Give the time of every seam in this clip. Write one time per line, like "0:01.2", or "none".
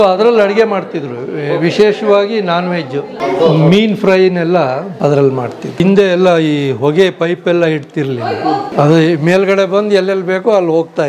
0:03.1
0:04.9
0:05.8
0:08.7